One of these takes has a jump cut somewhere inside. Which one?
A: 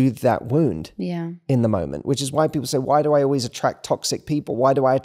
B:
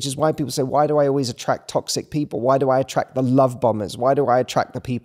A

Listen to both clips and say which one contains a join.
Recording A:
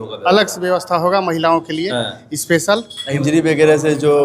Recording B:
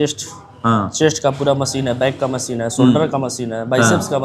A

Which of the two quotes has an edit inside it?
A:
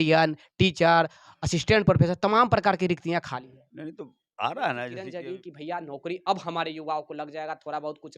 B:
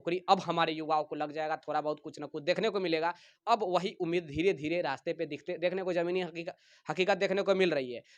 A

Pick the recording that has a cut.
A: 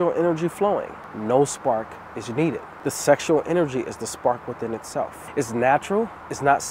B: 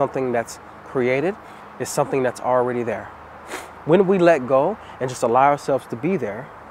A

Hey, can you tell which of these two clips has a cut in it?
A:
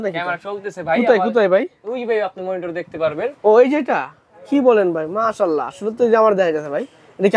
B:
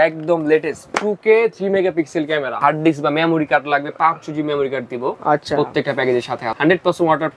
B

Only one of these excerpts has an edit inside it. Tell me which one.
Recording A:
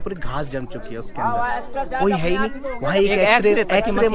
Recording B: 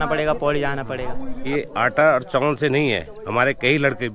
B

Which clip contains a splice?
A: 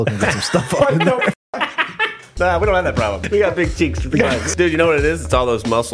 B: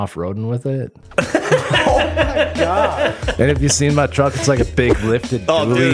A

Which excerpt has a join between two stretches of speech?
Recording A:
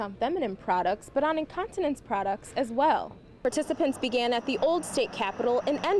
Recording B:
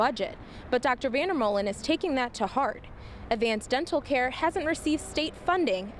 A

